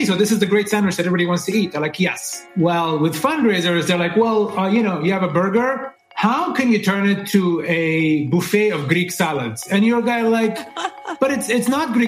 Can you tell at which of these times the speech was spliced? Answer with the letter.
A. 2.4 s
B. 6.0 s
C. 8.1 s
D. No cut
A